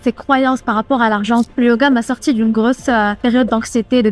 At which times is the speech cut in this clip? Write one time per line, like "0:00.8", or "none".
0:01.5
0:03.1